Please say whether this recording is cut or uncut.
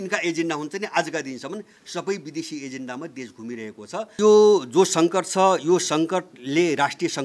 cut